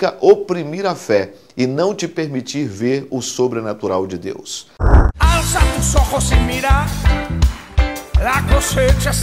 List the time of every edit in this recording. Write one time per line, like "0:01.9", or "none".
0:04.9